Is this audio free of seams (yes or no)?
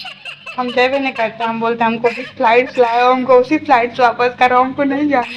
yes